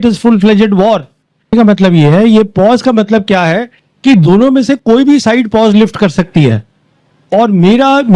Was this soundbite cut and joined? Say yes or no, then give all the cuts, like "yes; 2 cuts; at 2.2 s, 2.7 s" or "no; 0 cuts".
yes; 1 cut; at 1.5 s